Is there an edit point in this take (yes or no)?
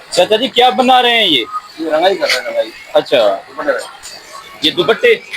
no